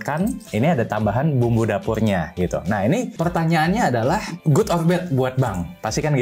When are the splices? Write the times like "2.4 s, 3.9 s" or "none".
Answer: 3.1 s, 4.3 s